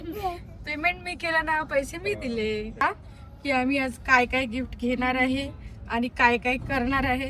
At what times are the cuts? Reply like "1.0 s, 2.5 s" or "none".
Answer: 2.8 s